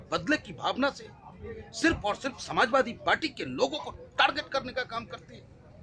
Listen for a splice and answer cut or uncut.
uncut